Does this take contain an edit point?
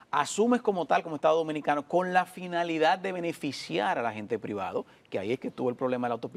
no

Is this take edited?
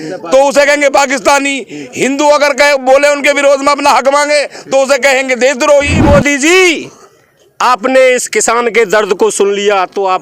yes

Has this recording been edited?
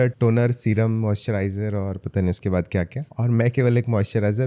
yes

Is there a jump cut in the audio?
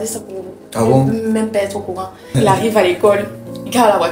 yes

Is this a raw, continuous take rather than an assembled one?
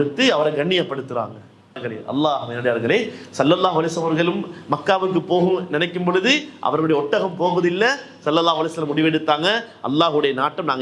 no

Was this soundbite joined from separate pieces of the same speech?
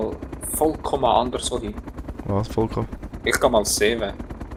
no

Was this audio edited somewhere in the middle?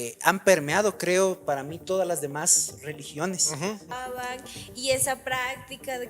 yes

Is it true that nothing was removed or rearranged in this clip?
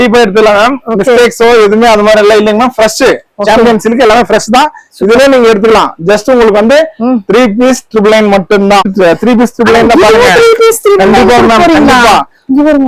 no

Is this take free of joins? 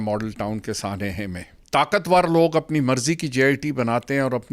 no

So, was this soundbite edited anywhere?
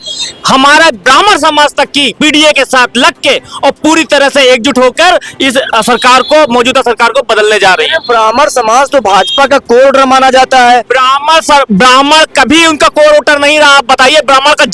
no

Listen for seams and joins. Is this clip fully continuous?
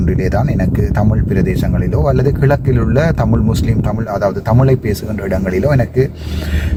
yes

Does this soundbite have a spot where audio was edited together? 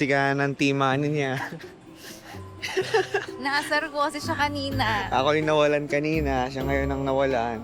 no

